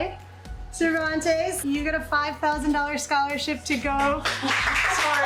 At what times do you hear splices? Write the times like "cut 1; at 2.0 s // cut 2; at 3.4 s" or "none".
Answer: none